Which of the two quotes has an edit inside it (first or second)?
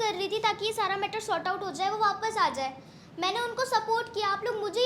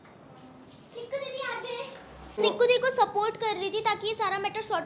second